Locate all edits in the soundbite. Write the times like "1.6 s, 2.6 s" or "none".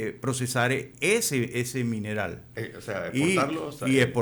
none